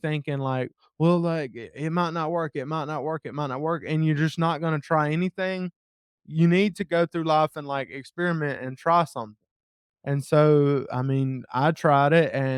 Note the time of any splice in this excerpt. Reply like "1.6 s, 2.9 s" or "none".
none